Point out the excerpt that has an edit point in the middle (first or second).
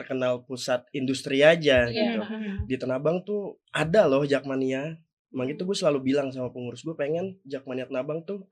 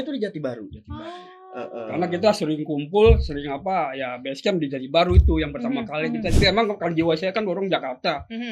second